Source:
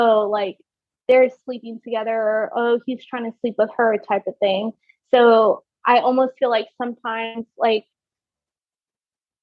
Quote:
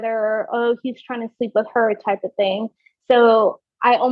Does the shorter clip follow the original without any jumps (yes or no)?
yes